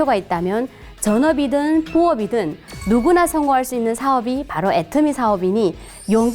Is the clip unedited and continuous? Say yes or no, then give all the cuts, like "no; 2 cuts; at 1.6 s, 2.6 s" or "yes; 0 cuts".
yes; 0 cuts